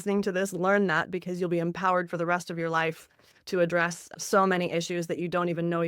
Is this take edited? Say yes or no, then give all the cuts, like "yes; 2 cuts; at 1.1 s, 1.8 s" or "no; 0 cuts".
no; 0 cuts